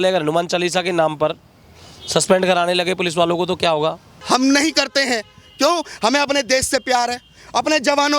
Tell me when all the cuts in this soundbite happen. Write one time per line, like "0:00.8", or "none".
0:04.1